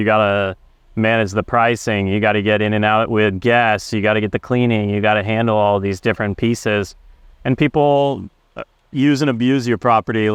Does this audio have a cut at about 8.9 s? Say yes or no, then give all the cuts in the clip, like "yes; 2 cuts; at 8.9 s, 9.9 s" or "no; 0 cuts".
no; 0 cuts